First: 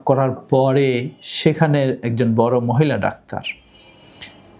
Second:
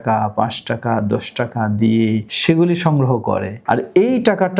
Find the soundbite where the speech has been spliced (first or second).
second